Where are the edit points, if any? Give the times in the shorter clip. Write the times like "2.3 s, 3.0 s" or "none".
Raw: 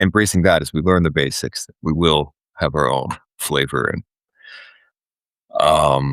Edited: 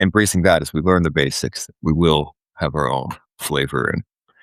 none